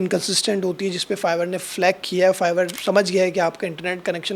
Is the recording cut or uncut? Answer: cut